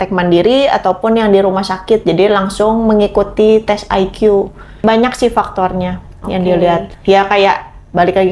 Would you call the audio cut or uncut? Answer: cut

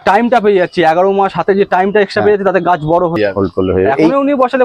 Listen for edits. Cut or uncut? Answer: cut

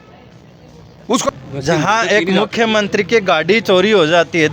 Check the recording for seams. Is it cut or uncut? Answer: cut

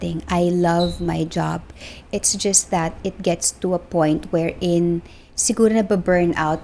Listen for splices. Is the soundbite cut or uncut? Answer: uncut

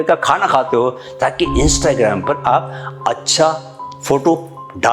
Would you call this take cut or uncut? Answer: uncut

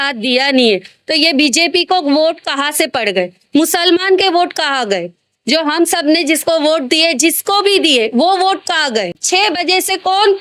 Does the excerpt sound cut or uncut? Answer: cut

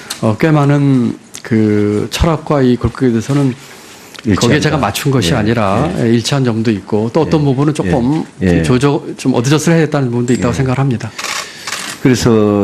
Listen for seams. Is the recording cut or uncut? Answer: cut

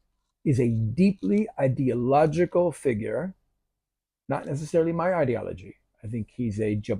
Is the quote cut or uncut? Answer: uncut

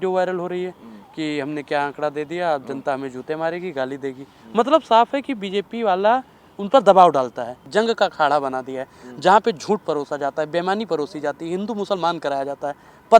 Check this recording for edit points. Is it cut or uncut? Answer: cut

